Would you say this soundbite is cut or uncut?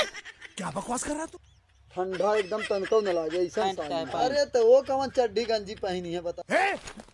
cut